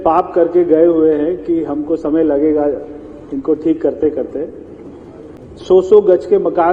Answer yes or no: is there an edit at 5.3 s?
yes